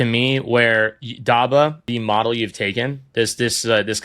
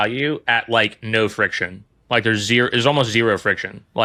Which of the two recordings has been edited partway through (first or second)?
first